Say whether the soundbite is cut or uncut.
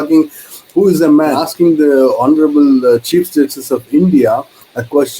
cut